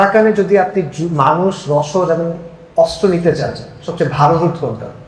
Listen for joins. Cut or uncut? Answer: uncut